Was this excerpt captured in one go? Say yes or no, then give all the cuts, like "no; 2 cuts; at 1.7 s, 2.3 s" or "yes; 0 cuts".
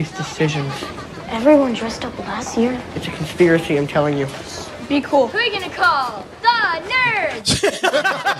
yes; 0 cuts